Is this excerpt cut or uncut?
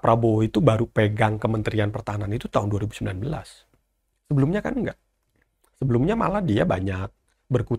uncut